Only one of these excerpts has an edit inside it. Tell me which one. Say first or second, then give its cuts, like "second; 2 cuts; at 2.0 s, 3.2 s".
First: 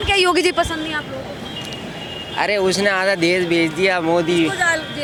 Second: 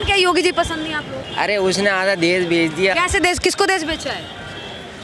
second; 2 cuts; at 1.2 s, 2.9 s